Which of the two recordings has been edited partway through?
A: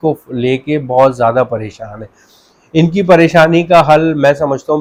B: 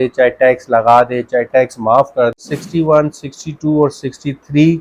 B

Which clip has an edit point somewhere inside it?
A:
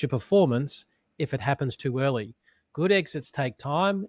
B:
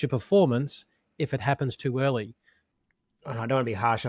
B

